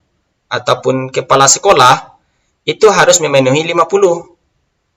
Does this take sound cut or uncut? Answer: uncut